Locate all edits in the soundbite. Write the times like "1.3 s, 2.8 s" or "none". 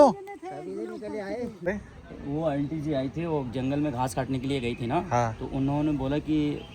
1.6 s